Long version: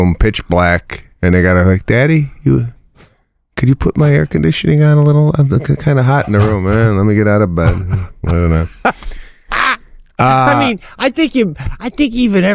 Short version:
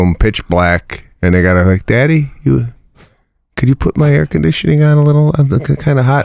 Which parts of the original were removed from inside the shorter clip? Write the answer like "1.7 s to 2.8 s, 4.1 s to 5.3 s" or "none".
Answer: none